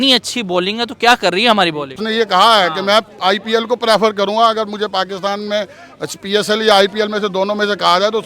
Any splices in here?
yes; 1 cut; at 2.0 s

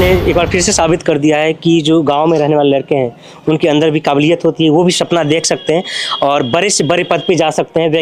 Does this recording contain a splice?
no; 0 cuts

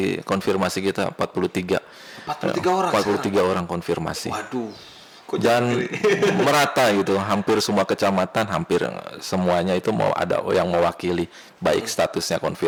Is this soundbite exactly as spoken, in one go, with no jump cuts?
yes; 0 cuts

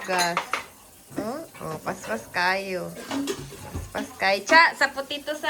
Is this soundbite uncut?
yes; 0 cuts

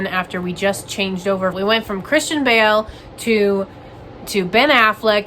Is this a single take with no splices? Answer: no; 1 cut; at 1.6 s

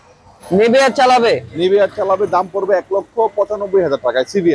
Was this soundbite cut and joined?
no; 0 cuts

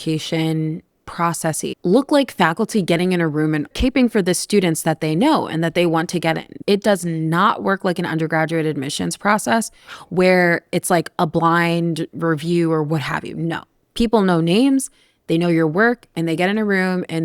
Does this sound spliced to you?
yes; 2 cuts; at 3.7 s, 6.5 s

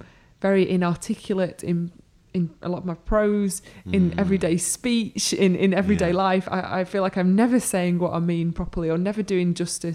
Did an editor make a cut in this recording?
no; 0 cuts

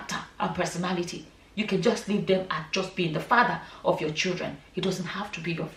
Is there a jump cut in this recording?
no; 0 cuts

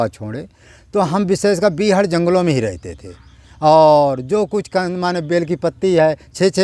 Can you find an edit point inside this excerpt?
no; 0 cuts

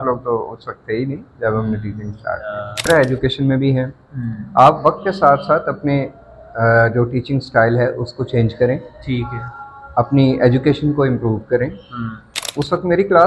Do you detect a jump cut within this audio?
yes; 2 cuts; at 2.9 s, 12.4 s

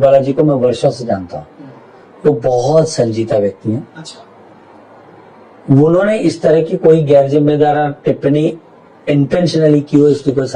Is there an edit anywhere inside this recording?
no; 0 cuts

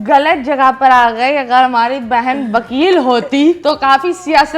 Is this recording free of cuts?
no; 1 cut; at 3.6 s

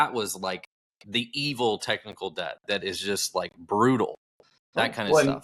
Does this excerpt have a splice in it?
no; 0 cuts

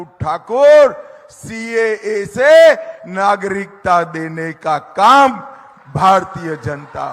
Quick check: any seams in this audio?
no; 0 cuts

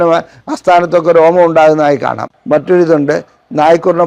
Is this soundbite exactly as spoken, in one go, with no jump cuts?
no; 1 cut; at 2.3 s

